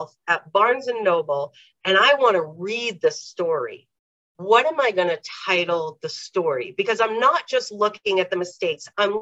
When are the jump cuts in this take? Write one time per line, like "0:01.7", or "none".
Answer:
none